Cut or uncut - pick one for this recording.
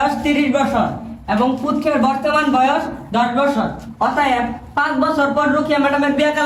uncut